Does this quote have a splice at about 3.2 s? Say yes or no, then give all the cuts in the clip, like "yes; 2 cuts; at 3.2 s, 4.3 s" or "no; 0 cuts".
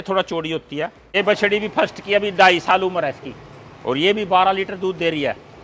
no; 1 cut; at 1.1 s